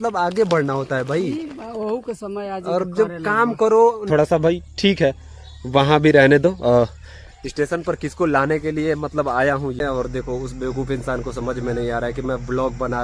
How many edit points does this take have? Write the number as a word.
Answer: two